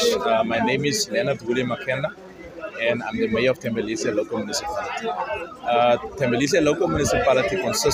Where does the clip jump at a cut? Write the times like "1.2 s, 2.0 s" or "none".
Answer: none